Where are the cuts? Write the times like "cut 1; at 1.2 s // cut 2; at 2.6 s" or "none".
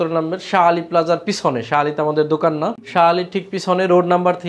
cut 1; at 2.8 s